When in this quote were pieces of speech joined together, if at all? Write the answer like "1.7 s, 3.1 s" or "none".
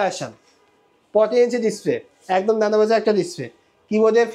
none